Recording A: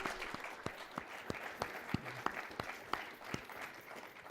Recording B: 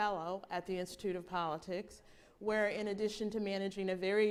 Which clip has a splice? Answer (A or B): A